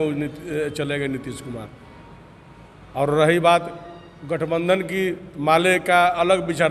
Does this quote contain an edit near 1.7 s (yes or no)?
no